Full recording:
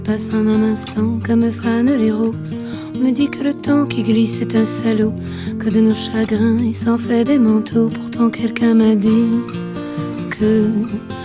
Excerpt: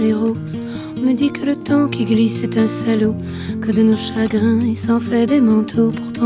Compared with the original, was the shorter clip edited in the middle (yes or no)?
no